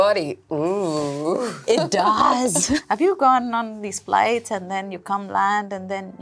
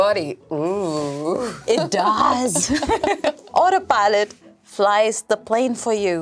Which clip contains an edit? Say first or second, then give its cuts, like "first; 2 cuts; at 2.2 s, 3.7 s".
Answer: second; 1 cut; at 3.1 s